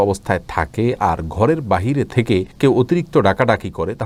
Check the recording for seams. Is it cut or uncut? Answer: uncut